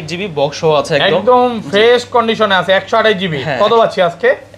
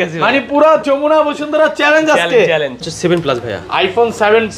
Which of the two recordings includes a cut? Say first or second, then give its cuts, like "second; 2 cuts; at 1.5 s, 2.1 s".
second; 1 cut; at 2.9 s